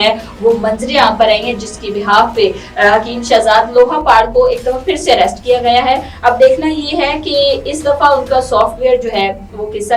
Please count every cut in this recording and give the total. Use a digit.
0